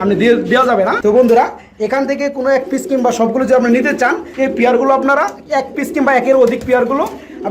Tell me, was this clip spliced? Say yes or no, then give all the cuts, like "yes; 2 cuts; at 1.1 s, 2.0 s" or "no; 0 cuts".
yes; 2 cuts; at 1.0 s, 4.2 s